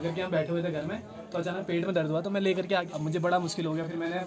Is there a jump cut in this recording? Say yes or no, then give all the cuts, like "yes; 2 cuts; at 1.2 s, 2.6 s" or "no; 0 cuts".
yes; 1 cut; at 2.9 s